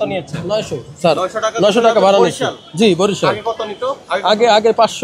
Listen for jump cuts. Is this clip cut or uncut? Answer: uncut